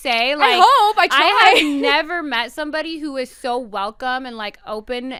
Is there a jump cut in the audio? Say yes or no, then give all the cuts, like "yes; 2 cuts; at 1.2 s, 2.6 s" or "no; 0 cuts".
no; 0 cuts